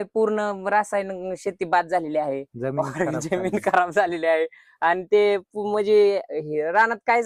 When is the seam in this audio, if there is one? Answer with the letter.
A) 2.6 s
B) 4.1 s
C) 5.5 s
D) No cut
D